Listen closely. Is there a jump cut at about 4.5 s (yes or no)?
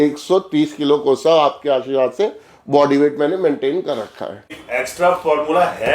yes